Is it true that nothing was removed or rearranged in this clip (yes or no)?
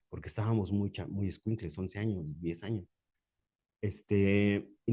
yes